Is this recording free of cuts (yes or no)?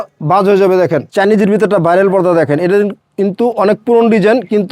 no